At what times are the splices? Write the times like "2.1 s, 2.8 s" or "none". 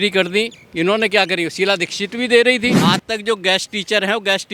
2.8 s